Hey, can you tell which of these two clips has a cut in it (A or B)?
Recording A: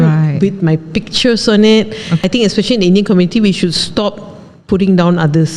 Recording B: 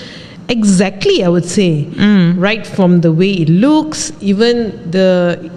A